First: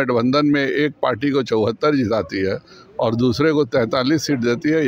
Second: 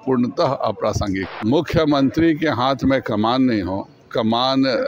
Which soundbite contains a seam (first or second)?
second